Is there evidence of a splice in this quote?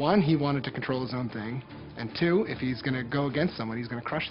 no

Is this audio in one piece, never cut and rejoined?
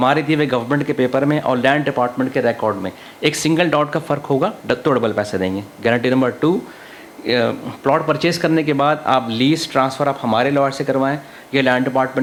yes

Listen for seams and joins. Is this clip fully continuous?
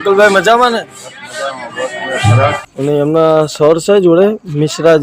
no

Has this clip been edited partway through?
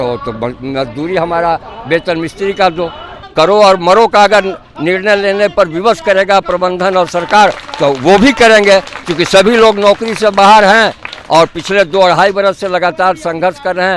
yes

